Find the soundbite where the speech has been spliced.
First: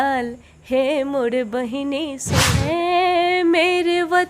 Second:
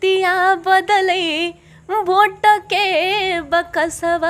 first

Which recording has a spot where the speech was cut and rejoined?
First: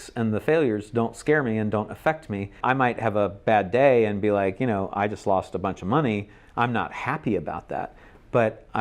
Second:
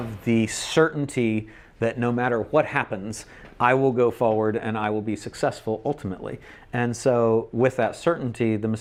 first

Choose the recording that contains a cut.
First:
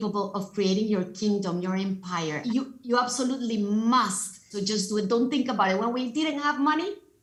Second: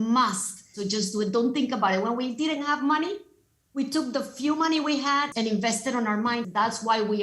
second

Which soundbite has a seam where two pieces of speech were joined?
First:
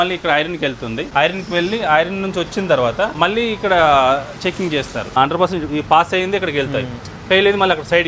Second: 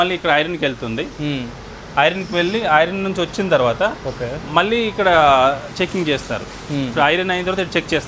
first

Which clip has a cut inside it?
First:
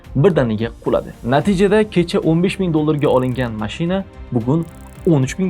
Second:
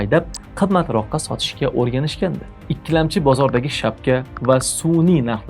second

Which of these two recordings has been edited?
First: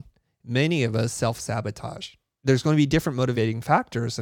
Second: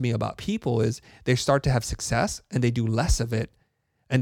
first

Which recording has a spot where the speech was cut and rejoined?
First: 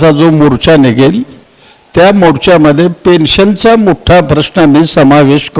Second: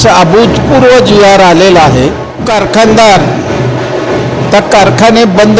second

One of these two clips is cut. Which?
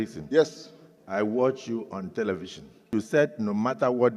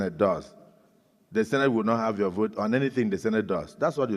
first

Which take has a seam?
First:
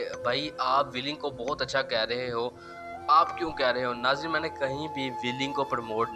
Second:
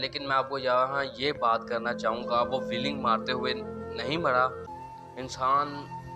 second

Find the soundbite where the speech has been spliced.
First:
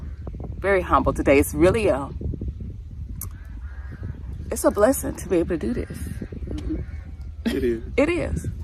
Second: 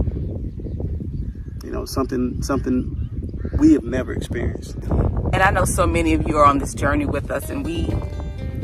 second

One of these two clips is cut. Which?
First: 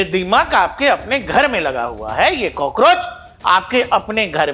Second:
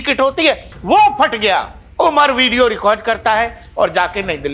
second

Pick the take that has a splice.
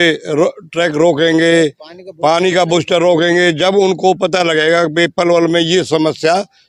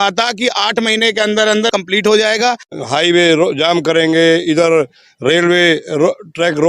second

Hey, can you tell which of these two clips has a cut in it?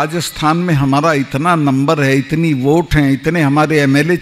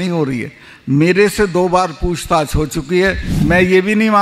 second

